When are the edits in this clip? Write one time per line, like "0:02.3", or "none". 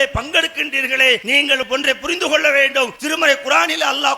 0:01.6
0:03.0

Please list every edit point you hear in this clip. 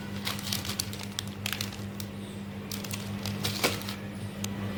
none

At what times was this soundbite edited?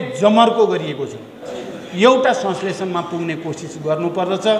0:01.5

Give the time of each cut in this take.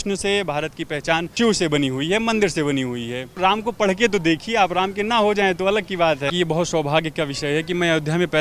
0:01.3
0:03.3
0:06.3

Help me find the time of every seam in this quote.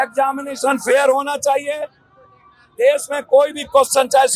none

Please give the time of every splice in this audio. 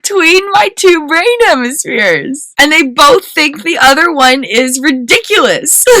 0:02.4

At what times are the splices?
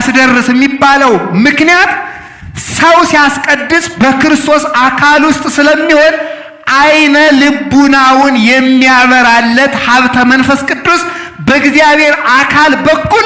none

